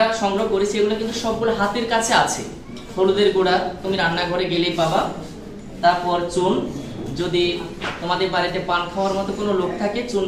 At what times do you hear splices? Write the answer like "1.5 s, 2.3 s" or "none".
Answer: none